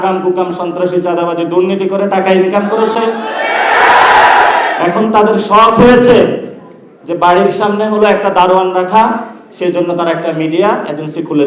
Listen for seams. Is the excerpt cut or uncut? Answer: uncut